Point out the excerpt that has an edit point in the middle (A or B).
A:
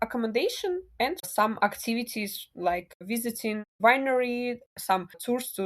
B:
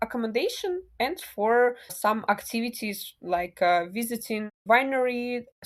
A